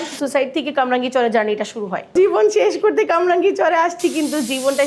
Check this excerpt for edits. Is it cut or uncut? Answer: uncut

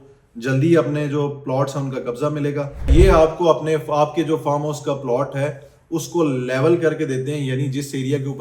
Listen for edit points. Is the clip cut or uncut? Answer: cut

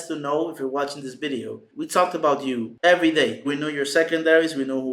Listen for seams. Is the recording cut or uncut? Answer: cut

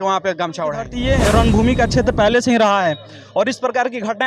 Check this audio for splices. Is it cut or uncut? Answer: cut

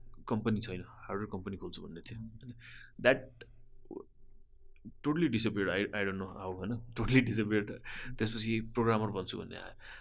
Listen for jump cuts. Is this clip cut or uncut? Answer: uncut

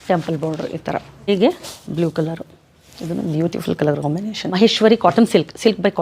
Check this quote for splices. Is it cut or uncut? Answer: cut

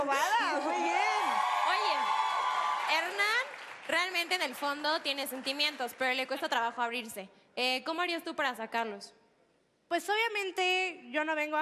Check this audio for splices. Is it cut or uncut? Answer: uncut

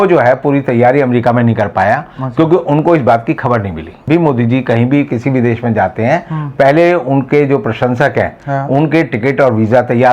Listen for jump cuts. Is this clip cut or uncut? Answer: cut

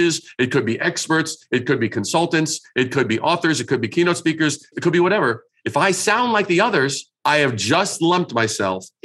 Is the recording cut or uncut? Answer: cut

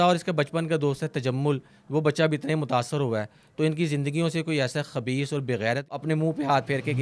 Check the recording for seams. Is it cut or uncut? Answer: cut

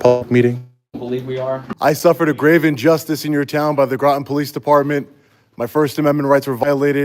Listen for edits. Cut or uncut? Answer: cut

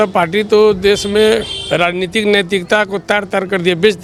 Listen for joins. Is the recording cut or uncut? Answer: uncut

